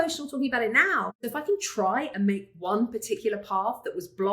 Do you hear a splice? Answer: yes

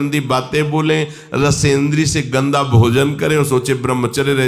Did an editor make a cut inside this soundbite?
no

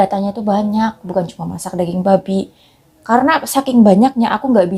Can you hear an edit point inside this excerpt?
no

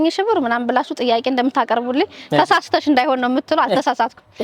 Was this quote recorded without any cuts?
yes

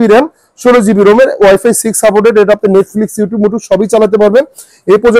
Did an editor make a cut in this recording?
no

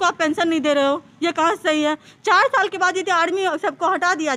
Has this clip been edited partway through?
no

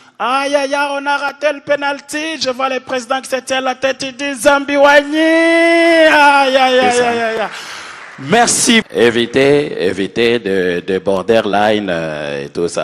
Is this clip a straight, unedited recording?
no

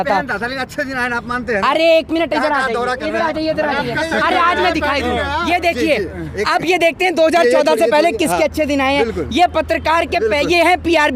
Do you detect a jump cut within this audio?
no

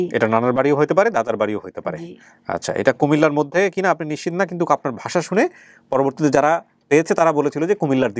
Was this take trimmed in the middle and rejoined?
no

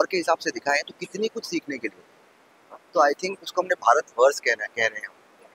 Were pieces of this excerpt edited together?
no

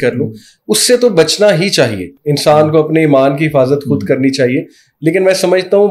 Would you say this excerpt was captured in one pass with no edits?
yes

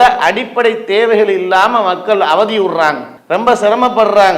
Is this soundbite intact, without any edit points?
no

